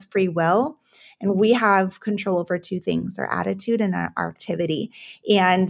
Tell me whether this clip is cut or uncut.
uncut